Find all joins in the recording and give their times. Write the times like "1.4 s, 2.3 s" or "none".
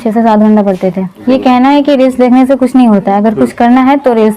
1.1 s